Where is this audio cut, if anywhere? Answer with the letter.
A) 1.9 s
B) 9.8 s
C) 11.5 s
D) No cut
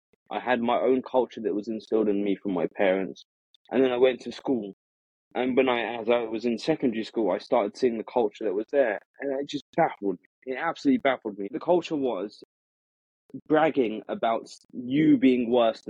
C